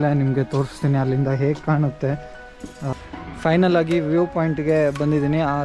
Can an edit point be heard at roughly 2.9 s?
yes; 1 cut; at 2.9 s

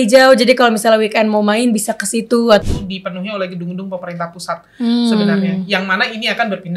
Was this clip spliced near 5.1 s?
no; 1 cut; at 2.6 s

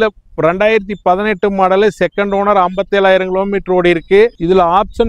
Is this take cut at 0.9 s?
no; 0 cuts

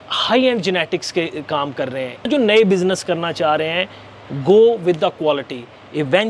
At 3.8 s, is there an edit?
no; 1 cut; at 2.3 s

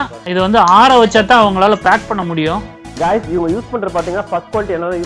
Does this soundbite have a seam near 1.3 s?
no; 1 cut; at 2.8 s

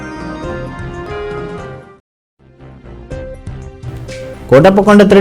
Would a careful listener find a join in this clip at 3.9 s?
yes; 1 cut; at 3.9 s

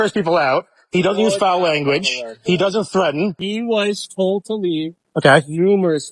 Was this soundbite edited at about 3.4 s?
yes; 1 cut; at 3.4 s

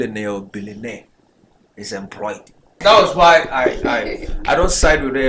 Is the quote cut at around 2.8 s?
yes; 1 cut; at 2.8 s

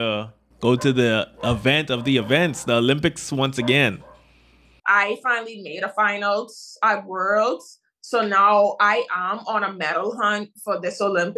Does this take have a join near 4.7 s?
yes; 1 cut; at 4.7 s

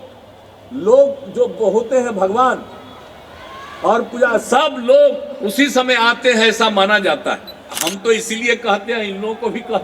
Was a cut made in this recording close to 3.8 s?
no; 1 cut; at 7.7 s

